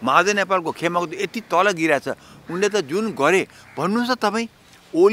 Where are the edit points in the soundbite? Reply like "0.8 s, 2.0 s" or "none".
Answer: none

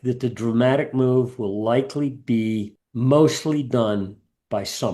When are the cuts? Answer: 2.8 s

